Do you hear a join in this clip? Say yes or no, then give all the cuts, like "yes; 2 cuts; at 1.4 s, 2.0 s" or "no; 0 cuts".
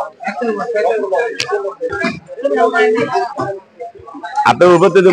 yes; 1 cut; at 1.9 s